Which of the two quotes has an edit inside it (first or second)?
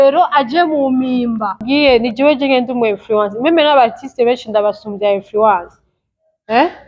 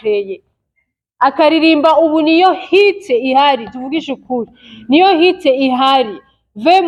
first